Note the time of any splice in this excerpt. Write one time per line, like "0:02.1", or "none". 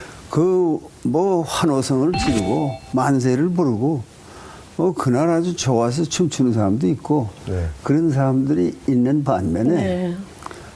0:01.5

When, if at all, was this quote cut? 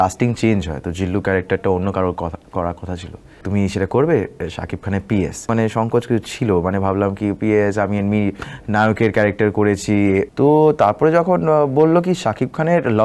0:03.4
0:05.5
0:10.3

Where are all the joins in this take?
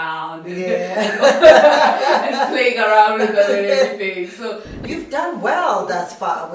0:04.8

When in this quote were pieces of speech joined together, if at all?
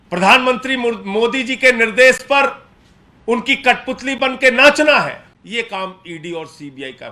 0:05.3

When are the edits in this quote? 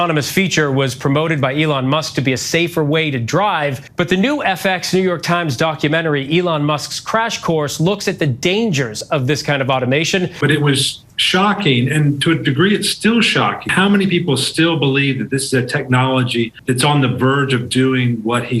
0:03.8
0:10.4
0:13.7

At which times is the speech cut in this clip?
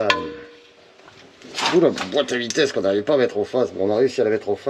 none

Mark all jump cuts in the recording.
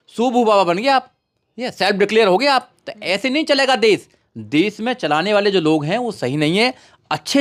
none

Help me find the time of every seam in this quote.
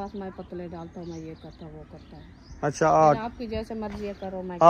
none

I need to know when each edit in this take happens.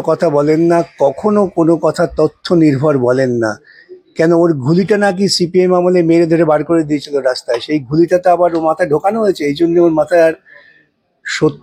none

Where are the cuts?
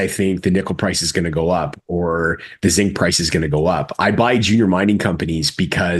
none

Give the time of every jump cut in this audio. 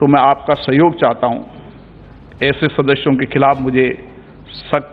none

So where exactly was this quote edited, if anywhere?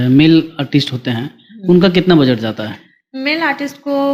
none

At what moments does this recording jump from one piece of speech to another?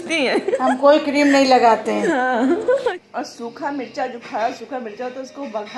0:02.8

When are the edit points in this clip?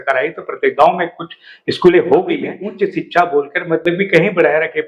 0:02.6

